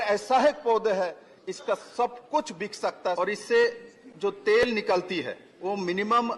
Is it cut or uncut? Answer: cut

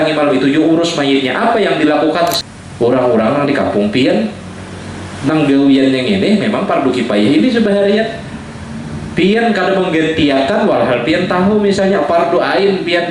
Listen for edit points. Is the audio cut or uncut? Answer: cut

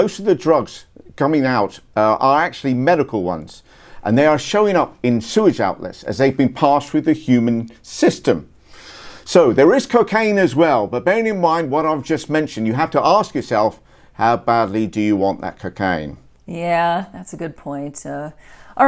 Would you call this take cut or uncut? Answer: uncut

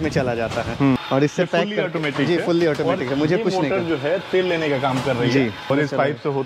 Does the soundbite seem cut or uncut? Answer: cut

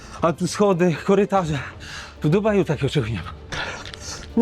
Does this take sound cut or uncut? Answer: cut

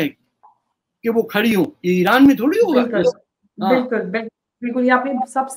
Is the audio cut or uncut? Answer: uncut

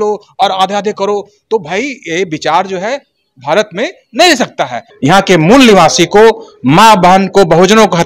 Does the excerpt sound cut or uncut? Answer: cut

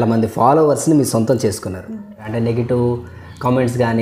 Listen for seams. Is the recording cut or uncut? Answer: cut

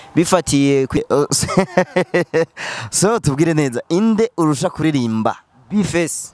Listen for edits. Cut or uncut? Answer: cut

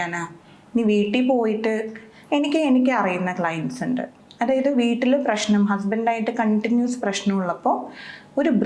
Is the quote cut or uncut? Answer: uncut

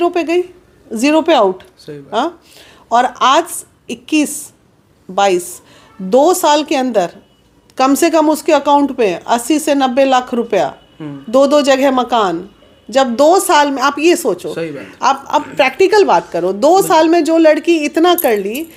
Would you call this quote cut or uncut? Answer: uncut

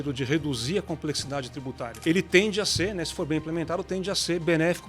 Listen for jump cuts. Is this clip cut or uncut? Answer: cut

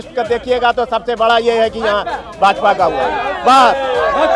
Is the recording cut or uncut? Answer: uncut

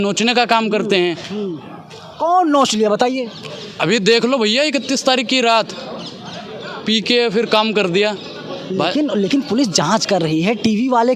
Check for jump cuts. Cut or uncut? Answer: uncut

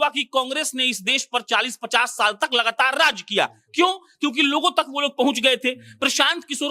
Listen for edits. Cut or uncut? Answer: uncut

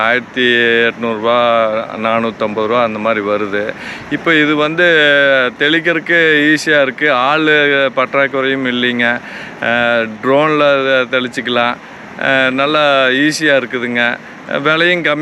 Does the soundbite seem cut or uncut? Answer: uncut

